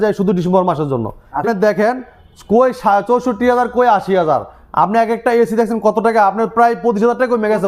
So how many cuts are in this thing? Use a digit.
1